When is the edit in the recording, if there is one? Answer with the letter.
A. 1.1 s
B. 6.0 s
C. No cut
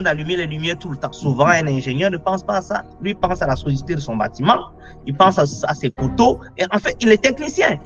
A